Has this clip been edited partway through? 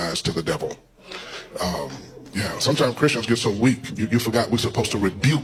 no; 0 cuts

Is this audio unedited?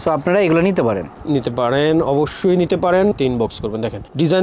no; 1 cut; at 3.1 s

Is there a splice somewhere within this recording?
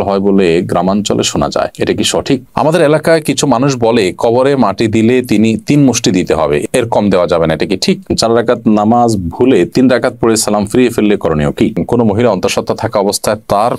yes; 3 cuts; at 2.5 s, 8.1 s, 11.8 s

